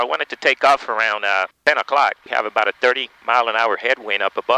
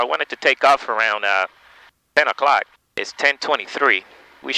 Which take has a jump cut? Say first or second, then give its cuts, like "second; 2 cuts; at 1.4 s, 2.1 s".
first; 2 cuts; at 1.5 s, 2.2 s